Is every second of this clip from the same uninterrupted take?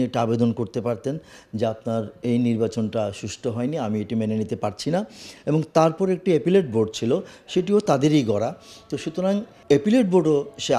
yes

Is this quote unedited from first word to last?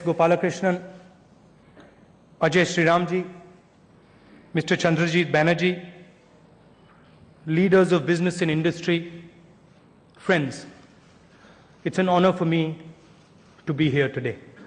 no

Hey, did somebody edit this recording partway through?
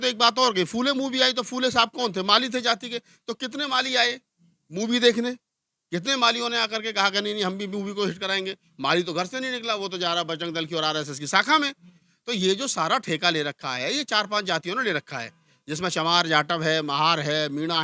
no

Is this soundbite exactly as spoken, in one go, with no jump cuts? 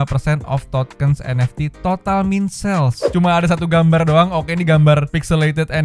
no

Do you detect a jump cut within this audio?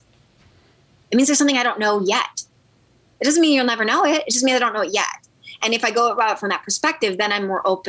no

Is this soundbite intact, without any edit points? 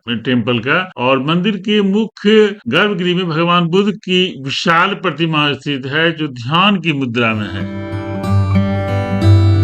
yes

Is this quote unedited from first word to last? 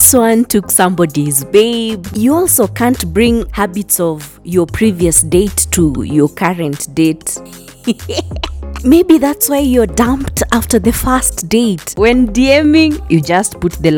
no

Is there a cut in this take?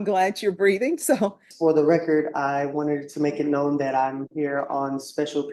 yes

